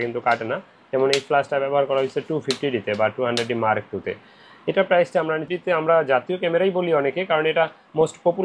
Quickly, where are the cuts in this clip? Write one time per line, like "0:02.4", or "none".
0:05.5

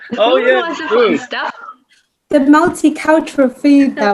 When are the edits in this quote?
none

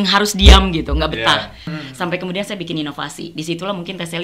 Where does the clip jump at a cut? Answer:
0:01.7

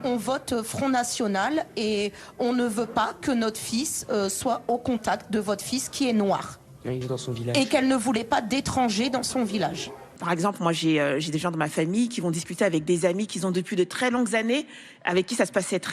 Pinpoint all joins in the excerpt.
0:07.0
0:10.2

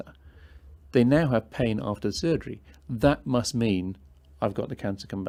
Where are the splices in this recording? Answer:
none

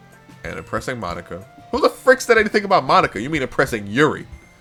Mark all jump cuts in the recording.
none

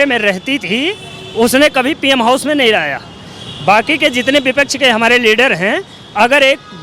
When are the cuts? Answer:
none

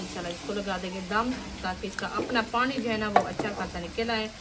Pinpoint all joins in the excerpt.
none

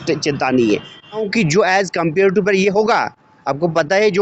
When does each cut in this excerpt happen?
0:01.3

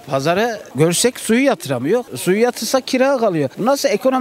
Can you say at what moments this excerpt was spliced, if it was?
none

